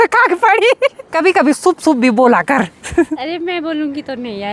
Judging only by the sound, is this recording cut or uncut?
cut